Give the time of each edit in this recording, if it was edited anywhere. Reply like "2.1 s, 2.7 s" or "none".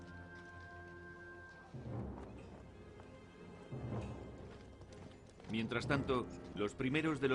2.8 s